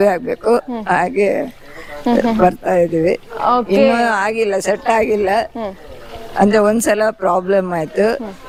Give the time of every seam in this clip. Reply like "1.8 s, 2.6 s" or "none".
none